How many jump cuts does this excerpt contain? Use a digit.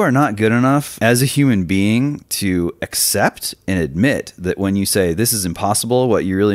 1